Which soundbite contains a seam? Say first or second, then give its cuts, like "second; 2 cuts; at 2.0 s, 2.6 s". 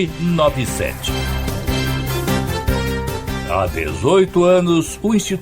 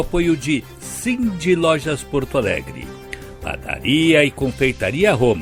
first; 3 cuts; at 1.0 s, 2.6 s, 3.3 s